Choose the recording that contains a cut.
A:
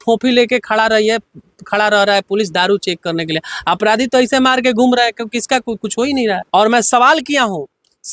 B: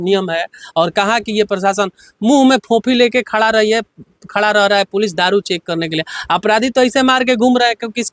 A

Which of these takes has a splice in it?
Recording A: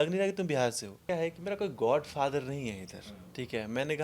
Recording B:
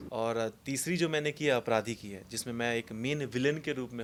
A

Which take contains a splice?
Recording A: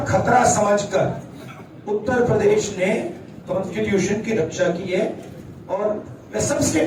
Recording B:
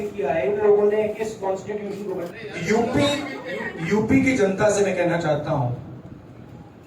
B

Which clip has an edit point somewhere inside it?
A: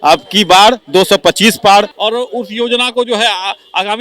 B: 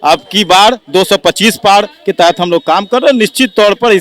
A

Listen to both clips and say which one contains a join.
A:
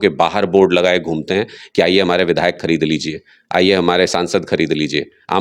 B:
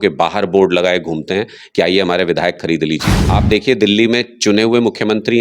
B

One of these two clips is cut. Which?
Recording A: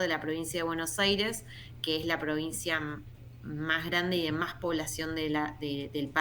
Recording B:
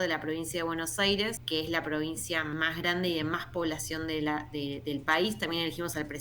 B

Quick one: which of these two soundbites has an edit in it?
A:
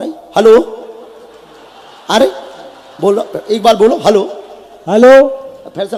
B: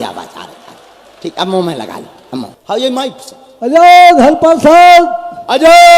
B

